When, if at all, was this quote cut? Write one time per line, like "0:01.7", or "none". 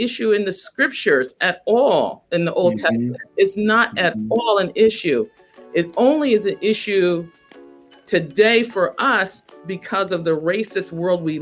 none